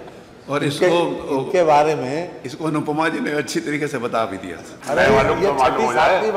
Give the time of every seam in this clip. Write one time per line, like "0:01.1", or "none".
0:04.7